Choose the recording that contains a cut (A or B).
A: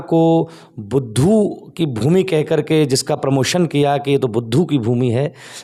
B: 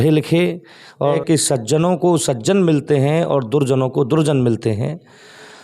B